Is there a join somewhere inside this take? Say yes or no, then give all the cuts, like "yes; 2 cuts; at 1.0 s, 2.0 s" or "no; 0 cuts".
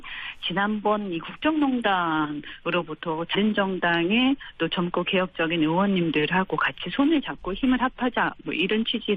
no; 0 cuts